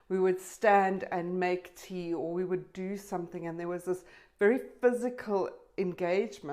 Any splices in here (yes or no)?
no